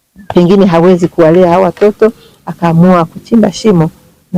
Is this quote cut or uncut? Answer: uncut